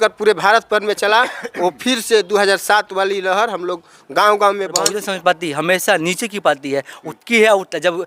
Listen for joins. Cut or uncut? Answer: cut